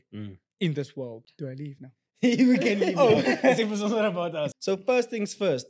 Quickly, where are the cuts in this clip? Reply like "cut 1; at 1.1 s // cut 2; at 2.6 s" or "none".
cut 1; at 1.2 s // cut 2; at 4.6 s

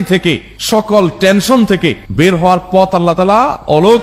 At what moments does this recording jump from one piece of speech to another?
none

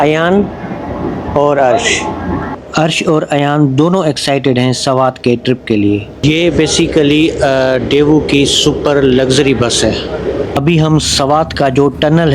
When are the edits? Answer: cut 1; at 2.5 s // cut 2; at 10.6 s

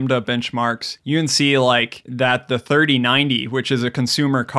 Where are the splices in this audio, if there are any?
cut 1; at 0.9 s // cut 2; at 2.0 s

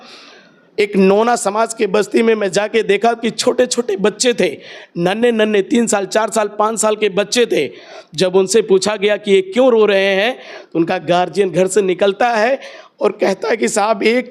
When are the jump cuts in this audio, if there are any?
none

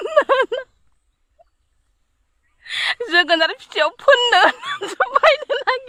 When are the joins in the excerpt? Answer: none

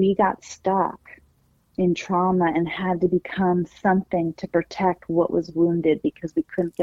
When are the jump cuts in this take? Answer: none

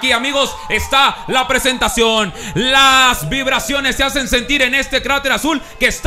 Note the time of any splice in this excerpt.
cut 1; at 3.6 s

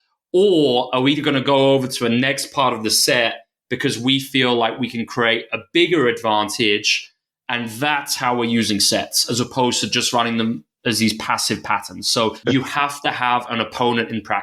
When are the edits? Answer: cut 1; at 12.4 s

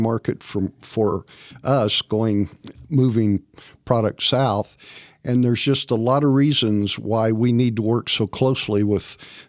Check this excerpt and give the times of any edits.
none

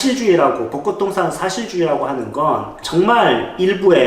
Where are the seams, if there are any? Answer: cut 1; at 2.8 s

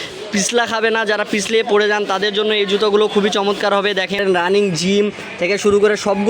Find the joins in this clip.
cut 1; at 4.2 s

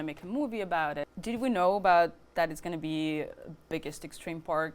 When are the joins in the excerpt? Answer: cut 1; at 1.1 s

